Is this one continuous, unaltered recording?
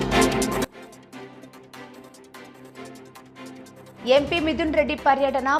yes; 0 cuts

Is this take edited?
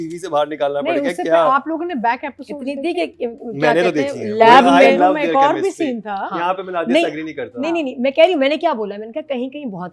no; 0 cuts

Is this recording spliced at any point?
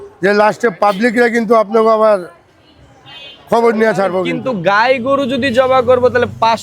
yes; 1 cut; at 4.4 s

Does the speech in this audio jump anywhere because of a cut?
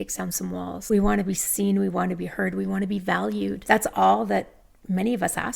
yes; 2 cuts; at 0.8 s, 3.6 s

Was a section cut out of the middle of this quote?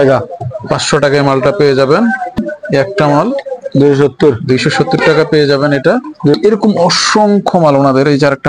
yes; 2 cuts; at 2.4 s, 6.3 s

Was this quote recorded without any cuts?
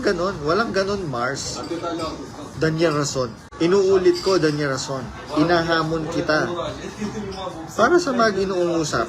no; 1 cut; at 3.4 s

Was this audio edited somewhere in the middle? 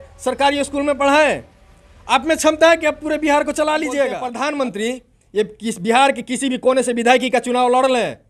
yes; 1 cut; at 4.3 s

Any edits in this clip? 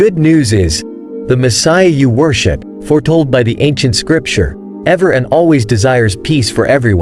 no; 0 cuts

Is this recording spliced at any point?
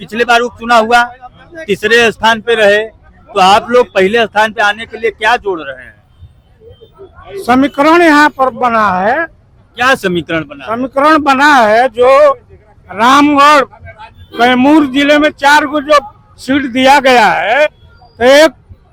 no; 0 cuts

